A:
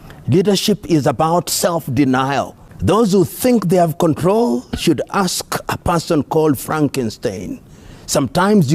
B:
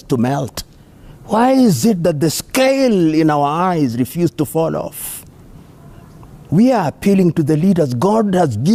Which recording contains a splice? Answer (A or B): A